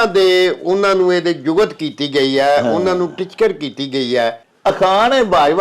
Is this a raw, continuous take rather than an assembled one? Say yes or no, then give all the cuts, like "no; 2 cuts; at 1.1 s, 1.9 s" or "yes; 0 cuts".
no; 1 cut; at 4.5 s